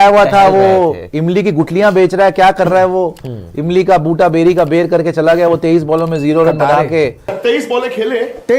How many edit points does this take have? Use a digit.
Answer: 1